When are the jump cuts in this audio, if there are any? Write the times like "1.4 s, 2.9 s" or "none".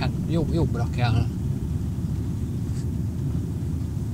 none